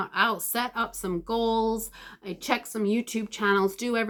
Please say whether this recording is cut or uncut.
uncut